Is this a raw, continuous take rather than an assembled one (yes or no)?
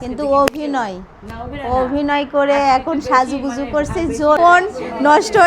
no